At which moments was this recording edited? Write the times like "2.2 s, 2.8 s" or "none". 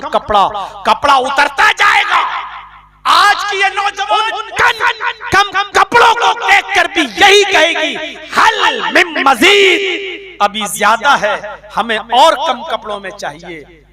4.4 s